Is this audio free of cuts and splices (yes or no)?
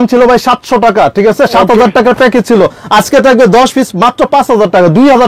yes